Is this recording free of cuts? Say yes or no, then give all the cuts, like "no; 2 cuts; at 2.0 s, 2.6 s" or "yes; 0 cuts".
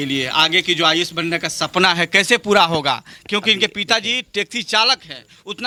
yes; 0 cuts